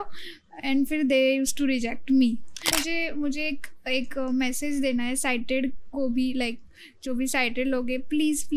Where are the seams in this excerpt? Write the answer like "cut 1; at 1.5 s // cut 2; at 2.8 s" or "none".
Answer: cut 1; at 2.7 s